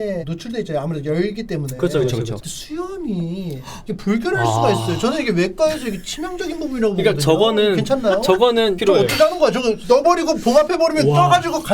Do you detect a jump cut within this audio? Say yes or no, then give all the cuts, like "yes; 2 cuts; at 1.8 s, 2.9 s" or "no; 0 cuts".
yes; 3 cuts; at 2.4 s, 8.8 s, 9.8 s